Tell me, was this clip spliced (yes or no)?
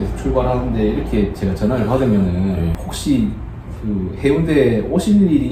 yes